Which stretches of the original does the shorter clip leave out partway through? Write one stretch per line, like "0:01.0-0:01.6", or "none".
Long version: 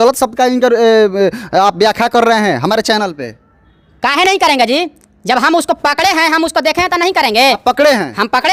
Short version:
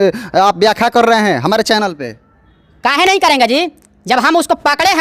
none